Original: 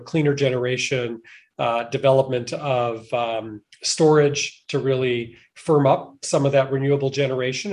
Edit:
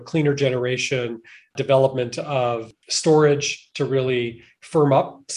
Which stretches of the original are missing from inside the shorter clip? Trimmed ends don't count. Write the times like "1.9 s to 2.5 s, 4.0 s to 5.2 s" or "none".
1.5 s to 1.9 s, 3.0 s to 3.6 s